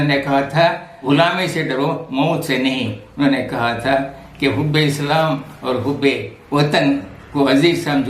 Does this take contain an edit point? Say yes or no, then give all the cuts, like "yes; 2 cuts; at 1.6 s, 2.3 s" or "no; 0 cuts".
yes; 2 cuts; at 0.9 s, 6.3 s